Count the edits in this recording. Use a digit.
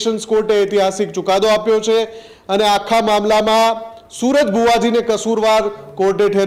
0